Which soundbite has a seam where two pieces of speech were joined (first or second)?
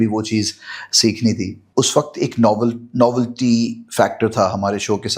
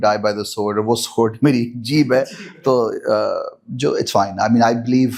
first